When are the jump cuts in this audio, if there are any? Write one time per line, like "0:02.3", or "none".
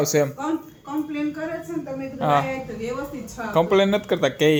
none